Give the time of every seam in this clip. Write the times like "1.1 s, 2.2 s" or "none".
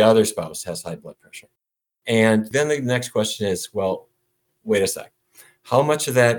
1.9 s, 2.5 s